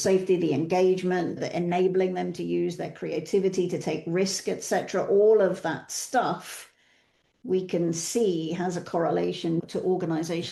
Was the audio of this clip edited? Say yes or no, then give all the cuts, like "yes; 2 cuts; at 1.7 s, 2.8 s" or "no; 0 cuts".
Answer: no; 0 cuts